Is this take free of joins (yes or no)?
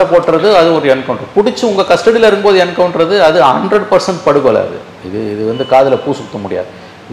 yes